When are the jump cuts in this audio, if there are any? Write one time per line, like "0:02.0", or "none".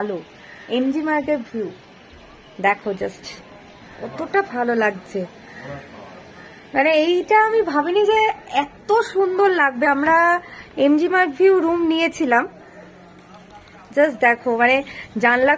none